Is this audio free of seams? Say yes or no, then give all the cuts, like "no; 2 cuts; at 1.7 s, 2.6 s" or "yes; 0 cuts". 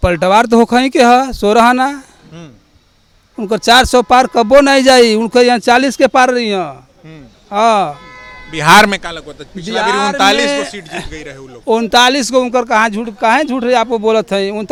yes; 0 cuts